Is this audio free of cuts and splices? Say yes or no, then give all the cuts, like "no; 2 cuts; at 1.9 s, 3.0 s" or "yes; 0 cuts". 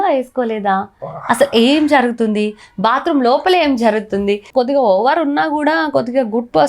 no; 1 cut; at 4.4 s